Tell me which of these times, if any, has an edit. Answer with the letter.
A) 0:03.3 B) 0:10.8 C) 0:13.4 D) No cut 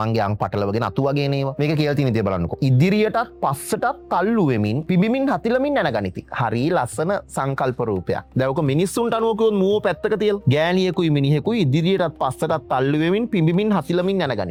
D